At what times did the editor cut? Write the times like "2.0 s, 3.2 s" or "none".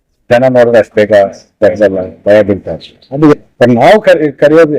3.3 s